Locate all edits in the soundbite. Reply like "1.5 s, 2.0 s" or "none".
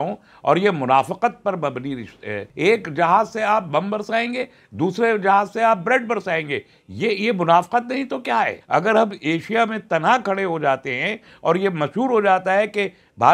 2.4 s, 8.6 s